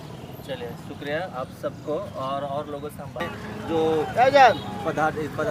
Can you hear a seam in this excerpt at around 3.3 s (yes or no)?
yes